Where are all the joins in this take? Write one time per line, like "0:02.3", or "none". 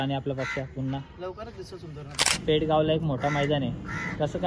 0:02.4